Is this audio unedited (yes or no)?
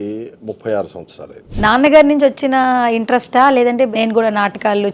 no